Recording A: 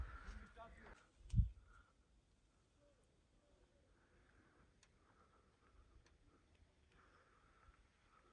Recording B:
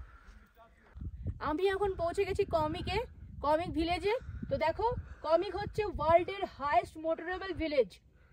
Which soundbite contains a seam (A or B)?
B